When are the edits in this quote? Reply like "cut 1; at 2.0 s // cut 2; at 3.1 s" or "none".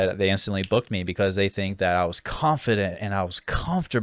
none